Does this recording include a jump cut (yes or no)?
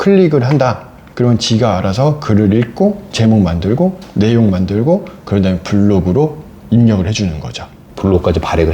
no